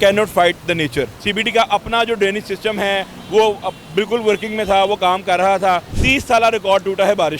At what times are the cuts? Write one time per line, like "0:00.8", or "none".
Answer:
0:01.2
0:06.0

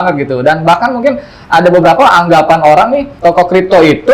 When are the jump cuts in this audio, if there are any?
0:03.1

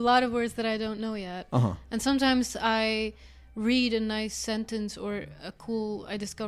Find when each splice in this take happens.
none

